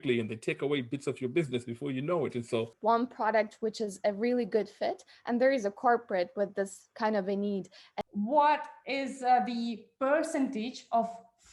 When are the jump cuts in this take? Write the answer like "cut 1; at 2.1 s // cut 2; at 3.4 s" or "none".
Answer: cut 1; at 2.7 s // cut 2; at 7.8 s